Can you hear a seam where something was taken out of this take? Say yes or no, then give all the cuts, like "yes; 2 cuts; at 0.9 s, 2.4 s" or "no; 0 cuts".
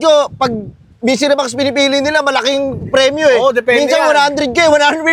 no; 0 cuts